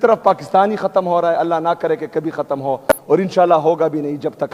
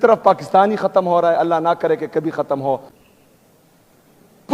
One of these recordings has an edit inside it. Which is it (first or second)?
second